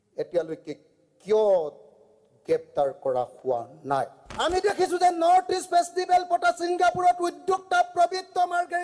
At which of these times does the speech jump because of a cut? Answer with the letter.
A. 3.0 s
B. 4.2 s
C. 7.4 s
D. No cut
B